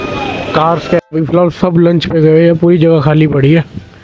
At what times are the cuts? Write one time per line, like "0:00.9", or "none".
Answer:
0:01.0